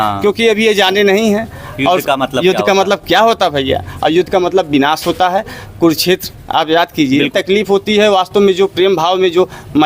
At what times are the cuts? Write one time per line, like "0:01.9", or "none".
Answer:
0:07.3